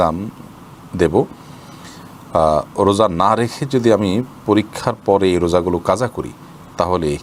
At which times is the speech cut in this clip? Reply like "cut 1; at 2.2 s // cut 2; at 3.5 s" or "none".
none